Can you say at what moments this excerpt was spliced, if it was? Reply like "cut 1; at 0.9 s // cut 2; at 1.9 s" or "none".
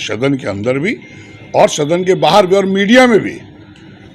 none